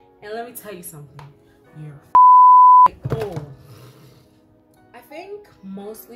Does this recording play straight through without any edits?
no; 1 cut; at 4.2 s

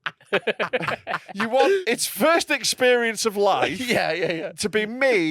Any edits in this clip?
yes; 1 cut; at 1.8 s

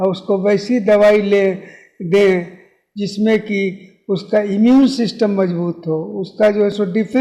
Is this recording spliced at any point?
no; 0 cuts

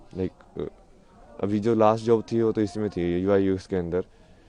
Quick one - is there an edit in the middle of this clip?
no; 0 cuts

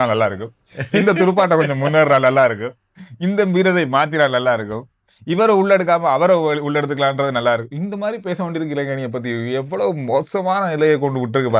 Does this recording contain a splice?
no; 0 cuts

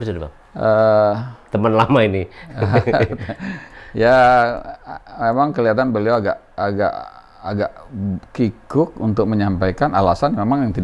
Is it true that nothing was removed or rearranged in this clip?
yes; 0 cuts

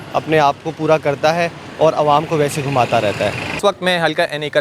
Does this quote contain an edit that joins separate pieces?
no; 0 cuts

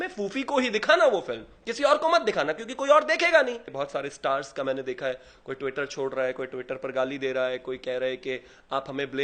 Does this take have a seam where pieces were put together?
yes; 1 cut; at 3.7 s

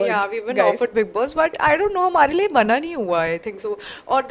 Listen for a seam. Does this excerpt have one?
no; 0 cuts

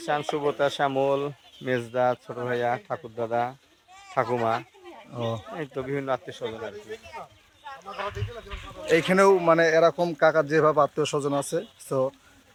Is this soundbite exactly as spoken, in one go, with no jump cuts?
yes; 0 cuts

